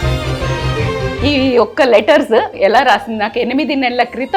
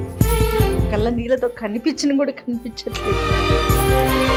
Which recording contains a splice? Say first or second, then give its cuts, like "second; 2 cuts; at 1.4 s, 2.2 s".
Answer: first; 2 cuts; at 0.9 s, 2.5 s